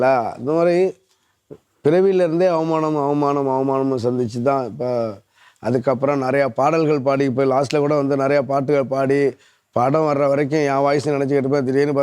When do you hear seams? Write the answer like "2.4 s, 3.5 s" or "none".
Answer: none